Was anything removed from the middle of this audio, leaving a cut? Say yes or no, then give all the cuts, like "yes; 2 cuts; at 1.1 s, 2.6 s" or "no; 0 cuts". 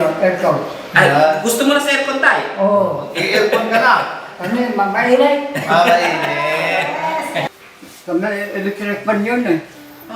yes; 1 cut; at 7.5 s